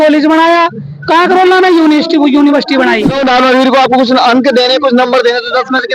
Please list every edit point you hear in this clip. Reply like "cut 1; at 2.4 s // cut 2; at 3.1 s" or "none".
cut 1; at 3.2 s